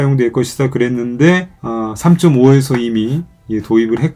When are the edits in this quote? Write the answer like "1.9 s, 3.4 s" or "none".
none